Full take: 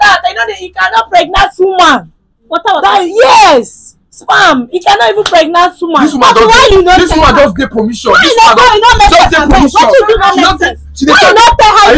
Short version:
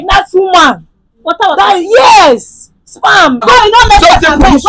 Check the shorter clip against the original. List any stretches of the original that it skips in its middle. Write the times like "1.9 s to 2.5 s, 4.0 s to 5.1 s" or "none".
4.7 s to 8.5 s